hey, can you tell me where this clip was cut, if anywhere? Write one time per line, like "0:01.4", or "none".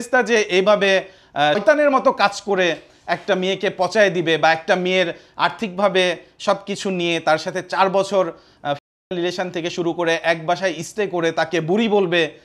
0:01.6